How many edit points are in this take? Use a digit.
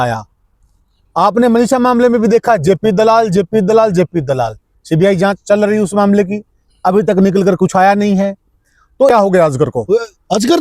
1